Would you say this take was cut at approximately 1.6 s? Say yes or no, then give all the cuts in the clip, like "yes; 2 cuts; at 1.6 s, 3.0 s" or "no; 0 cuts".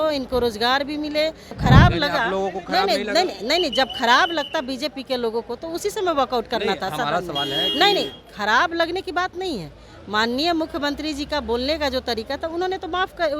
yes; 1 cut; at 1.6 s